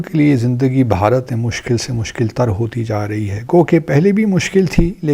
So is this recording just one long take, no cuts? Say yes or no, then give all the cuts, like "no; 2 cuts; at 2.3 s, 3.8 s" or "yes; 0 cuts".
no; 1 cut; at 3.4 s